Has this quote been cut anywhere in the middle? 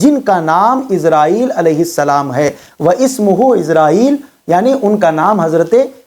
no; 0 cuts

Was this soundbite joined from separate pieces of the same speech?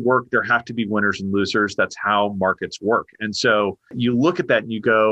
yes; 1 cut; at 3.9 s

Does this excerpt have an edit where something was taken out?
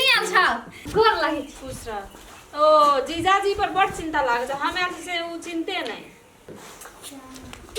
no; 0 cuts

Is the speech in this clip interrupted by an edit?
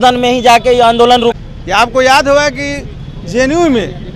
yes; 1 cut; at 1.4 s

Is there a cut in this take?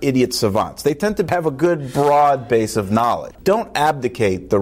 yes; 2 cuts; at 1.3 s, 3.4 s

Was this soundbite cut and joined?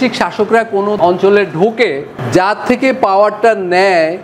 yes; 2 cuts; at 1.0 s, 2.1 s

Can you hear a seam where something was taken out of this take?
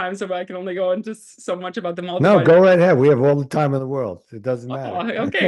no; 0 cuts

